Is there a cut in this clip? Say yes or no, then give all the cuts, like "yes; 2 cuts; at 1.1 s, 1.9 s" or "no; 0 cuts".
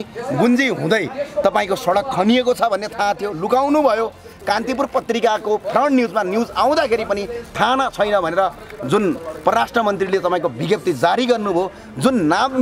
no; 0 cuts